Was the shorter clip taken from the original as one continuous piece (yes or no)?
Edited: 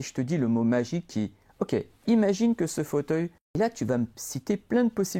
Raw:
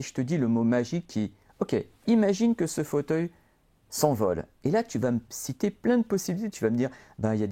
no